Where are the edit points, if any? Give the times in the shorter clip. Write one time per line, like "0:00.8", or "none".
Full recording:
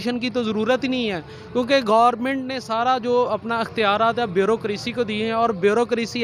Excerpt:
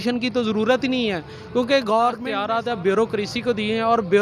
0:02.3